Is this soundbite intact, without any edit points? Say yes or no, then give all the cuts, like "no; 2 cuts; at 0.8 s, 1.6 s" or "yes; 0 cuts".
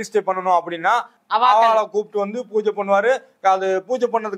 no; 1 cut; at 1.1 s